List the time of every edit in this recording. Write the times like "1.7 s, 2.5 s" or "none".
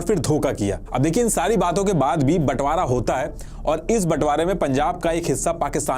none